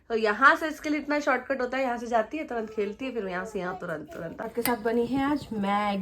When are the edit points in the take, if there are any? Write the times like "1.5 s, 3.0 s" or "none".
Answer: 4.4 s